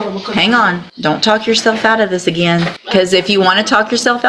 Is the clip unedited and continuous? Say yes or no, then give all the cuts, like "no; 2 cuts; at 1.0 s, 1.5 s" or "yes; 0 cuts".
no; 2 cuts; at 0.9 s, 2.8 s